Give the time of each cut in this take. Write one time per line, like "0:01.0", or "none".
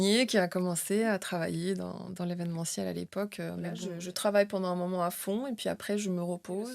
0:03.9